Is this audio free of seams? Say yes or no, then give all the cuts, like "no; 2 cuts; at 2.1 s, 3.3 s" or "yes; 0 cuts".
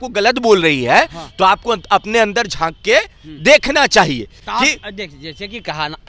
yes; 0 cuts